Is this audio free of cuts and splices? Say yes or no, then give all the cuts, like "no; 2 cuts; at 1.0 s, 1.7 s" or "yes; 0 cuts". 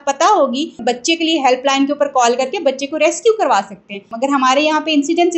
no; 2 cuts; at 0.8 s, 4.1 s